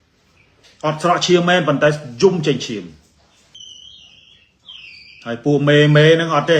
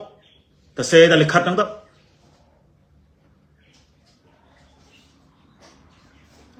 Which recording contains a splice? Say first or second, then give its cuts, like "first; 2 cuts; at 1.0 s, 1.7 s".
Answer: first; 1 cut; at 3.5 s